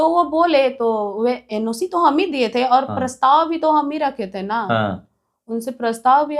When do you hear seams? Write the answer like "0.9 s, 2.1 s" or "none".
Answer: none